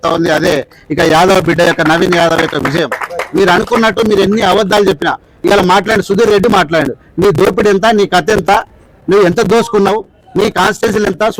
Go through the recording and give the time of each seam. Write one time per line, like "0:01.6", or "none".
none